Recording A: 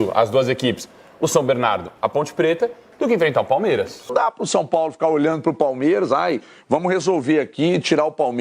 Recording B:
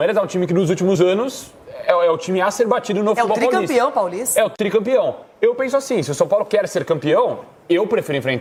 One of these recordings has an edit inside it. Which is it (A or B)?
A